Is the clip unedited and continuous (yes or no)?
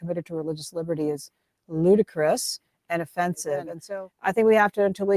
no